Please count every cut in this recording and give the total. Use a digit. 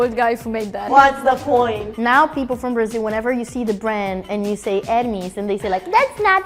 2